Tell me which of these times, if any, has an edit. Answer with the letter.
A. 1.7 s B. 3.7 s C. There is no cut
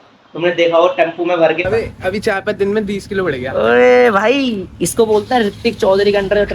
A